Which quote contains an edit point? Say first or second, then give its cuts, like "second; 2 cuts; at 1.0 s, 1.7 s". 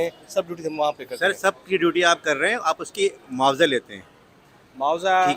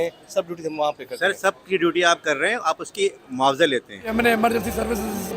second; 1 cut; at 4.1 s